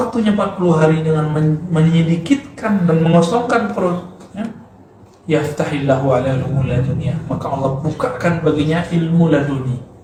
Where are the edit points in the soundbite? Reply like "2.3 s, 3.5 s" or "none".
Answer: none